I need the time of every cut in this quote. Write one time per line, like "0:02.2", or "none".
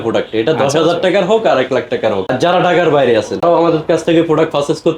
0:02.3
0:03.4